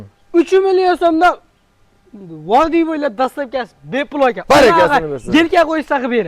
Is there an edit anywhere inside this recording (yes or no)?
no